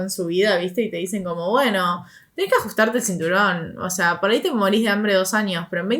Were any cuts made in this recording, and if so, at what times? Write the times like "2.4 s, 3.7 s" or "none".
none